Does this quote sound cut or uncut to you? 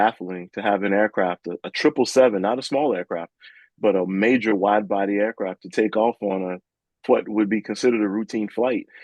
uncut